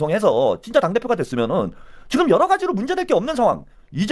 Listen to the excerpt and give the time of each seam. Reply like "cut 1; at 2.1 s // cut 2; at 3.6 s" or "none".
none